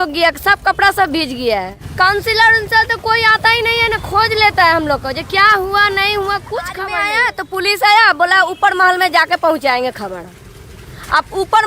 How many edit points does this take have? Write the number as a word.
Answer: two